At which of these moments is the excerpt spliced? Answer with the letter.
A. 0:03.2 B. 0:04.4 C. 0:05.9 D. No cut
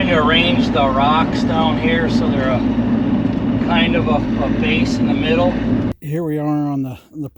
C